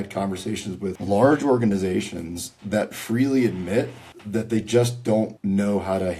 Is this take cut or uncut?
cut